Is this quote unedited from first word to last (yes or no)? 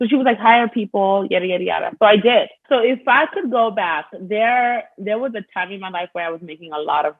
no